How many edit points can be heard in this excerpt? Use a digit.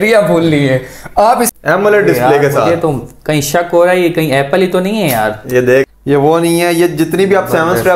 2